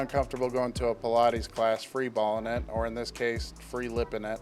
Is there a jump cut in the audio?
no; 0 cuts

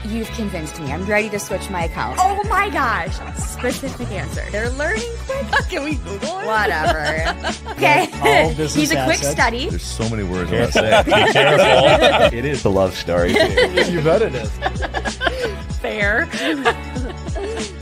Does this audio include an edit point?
no; 0 cuts

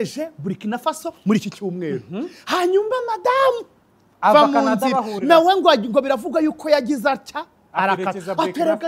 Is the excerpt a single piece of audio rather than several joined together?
yes; 0 cuts

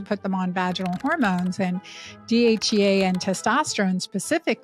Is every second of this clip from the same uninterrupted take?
yes; 0 cuts

